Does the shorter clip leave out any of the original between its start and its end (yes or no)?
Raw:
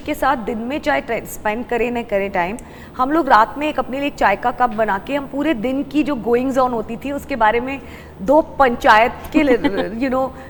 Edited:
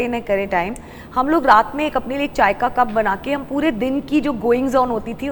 no